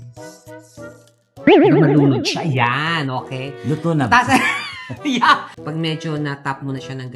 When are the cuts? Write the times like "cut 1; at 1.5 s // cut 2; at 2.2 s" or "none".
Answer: cut 1; at 5.6 s

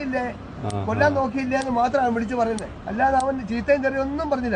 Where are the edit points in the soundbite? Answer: cut 1; at 2.8 s

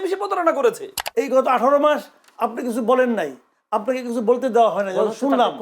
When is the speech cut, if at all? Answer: cut 1; at 0.9 s

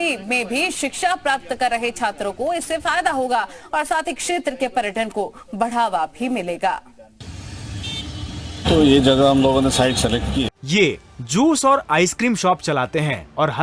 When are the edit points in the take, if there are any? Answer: cut 1; at 10.5 s

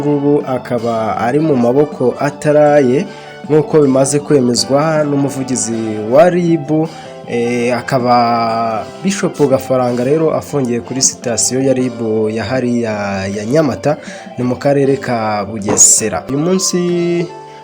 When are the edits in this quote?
cut 1; at 16.3 s

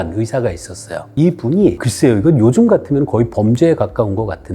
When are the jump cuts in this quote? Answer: cut 1; at 1.1 s // cut 2; at 1.8 s

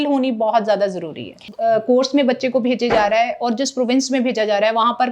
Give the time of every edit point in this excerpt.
cut 1; at 1.5 s

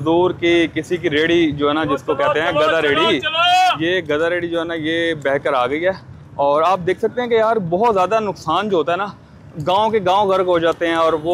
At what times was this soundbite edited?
none

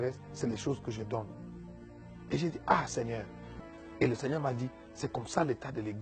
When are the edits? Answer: cut 1; at 3.4 s

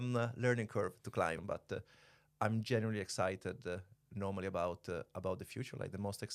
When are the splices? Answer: cut 1; at 1.4 s

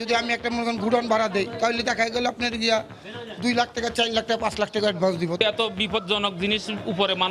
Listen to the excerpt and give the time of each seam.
cut 1; at 5.4 s

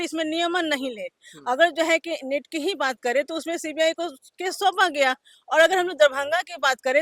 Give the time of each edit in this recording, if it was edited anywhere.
none

